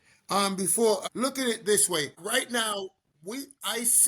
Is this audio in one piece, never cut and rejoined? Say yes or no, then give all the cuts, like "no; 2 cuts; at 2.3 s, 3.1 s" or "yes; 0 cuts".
no; 2 cuts; at 1.0 s, 2.2 s